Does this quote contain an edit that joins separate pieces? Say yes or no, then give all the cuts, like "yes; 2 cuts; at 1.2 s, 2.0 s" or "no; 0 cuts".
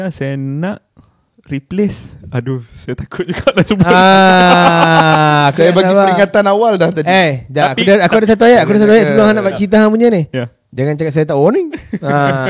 no; 0 cuts